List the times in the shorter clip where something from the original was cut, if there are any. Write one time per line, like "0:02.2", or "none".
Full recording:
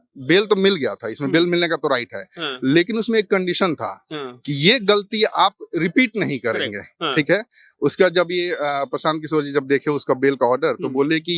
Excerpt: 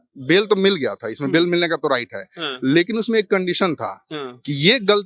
none